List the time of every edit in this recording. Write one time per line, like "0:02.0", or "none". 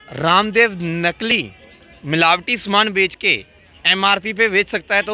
0:01.3